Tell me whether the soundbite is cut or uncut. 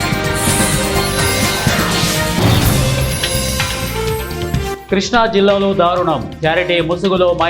uncut